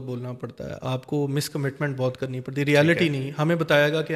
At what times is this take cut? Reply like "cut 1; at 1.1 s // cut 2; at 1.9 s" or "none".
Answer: none